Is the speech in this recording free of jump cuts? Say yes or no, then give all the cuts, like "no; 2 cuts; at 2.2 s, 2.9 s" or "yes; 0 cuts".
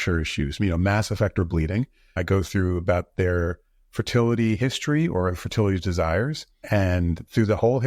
yes; 0 cuts